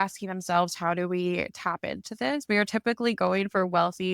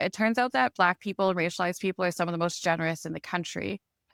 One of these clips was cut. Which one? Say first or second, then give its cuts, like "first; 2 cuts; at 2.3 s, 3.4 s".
first; 1 cut; at 2.4 s